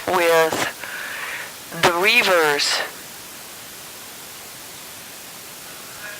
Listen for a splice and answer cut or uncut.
cut